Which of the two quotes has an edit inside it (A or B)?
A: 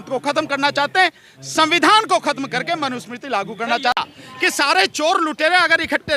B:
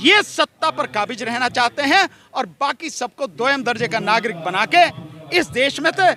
A